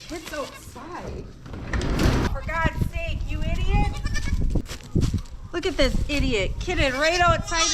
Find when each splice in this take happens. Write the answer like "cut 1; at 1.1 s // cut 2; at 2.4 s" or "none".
cut 1; at 2.3 s // cut 2; at 4.7 s